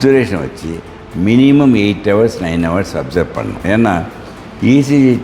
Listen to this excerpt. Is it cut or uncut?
cut